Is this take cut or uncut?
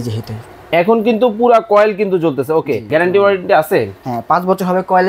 cut